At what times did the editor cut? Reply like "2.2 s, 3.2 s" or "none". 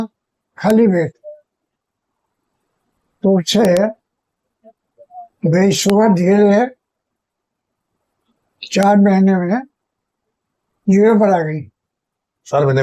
none